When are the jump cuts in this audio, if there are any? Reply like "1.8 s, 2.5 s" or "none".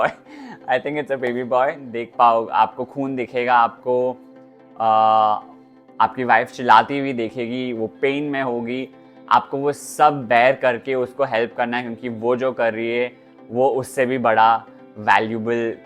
1.9 s